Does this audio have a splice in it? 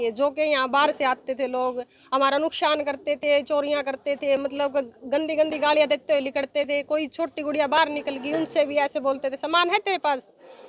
no; 0 cuts

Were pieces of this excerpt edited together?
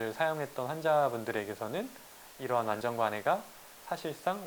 no; 0 cuts

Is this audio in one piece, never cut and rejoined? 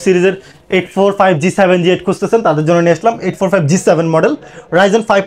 yes; 0 cuts

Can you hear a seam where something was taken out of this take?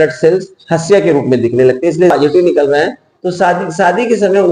yes; 1 cut; at 2.1 s

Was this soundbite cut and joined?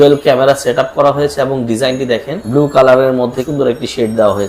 yes; 2 cuts; at 2.4 s, 3.4 s

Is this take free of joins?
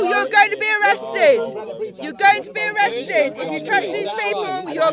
yes; 0 cuts

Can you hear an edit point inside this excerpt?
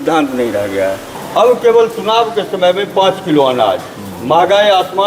yes; 1 cut; at 1.1 s

